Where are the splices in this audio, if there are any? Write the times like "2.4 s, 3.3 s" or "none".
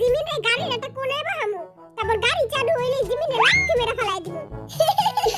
none